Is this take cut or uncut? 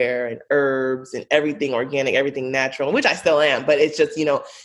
uncut